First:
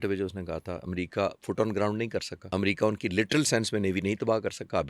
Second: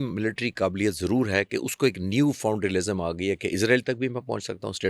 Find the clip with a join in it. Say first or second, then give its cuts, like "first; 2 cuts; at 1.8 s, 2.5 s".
first; 1 cut; at 2.4 s